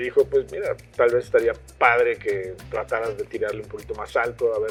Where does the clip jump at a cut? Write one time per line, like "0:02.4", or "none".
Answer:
none